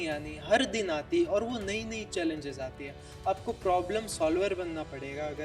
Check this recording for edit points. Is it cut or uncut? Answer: uncut